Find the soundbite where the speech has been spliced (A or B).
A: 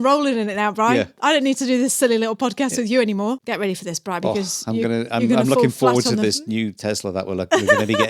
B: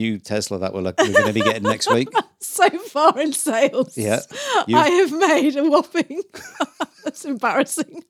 A